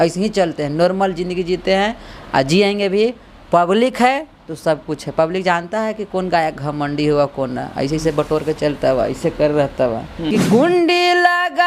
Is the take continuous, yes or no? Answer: no